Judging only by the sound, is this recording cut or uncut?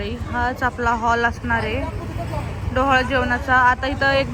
uncut